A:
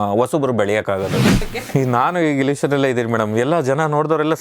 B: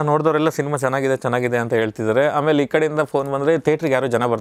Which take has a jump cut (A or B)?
A